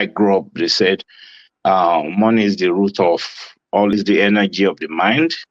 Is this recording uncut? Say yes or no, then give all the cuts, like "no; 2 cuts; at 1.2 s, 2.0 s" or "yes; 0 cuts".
no; 1 cut; at 3.9 s